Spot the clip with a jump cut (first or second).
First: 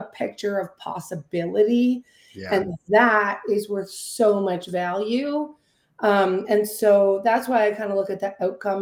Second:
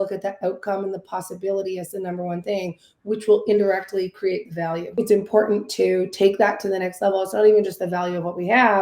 second